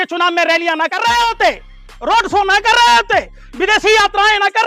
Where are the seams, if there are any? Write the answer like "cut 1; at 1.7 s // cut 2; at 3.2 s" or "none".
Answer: none